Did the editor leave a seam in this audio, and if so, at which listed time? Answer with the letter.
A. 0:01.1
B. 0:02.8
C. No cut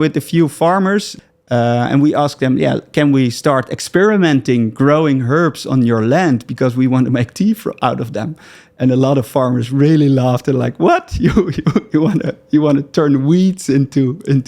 A